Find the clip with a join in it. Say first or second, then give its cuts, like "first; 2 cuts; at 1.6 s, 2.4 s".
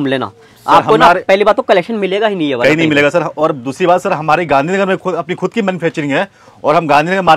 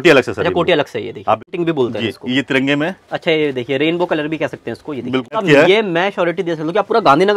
second; 2 cuts; at 1.5 s, 5.4 s